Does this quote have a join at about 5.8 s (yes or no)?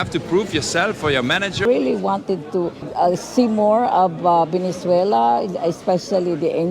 no